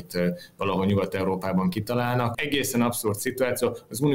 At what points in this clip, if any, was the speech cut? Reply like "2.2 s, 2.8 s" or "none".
2.4 s

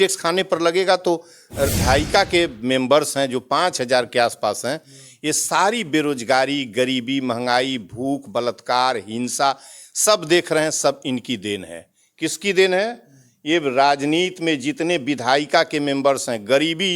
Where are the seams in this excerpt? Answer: 1.8 s

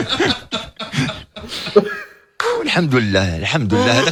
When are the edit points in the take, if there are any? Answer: none

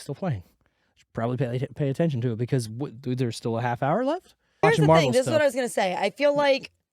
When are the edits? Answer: 4.6 s

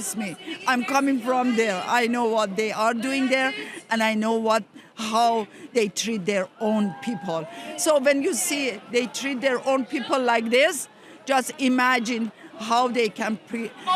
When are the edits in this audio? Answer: none

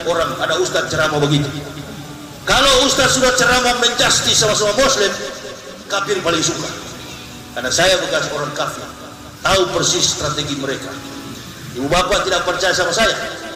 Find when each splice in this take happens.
none

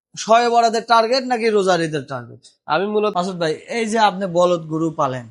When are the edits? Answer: 3.1 s

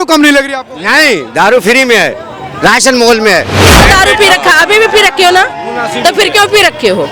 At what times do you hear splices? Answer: 3.6 s

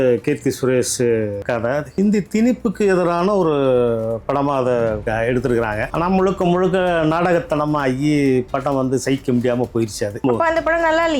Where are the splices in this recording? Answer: 1.9 s, 5.0 s, 5.9 s, 10.2 s

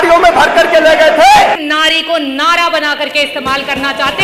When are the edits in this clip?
1.6 s

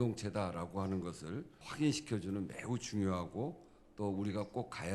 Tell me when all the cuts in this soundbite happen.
1.6 s

